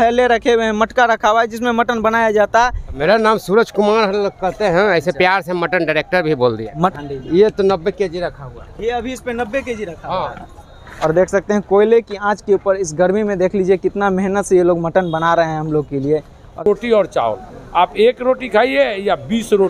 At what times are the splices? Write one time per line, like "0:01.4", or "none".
0:03.0
0:06.9
0:10.8
0:16.6